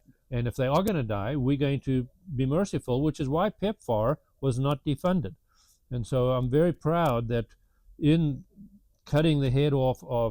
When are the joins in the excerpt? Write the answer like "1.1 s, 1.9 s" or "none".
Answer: none